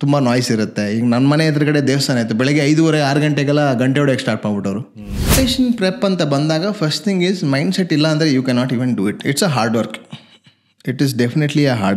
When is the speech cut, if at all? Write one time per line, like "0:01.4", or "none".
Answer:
0:05.3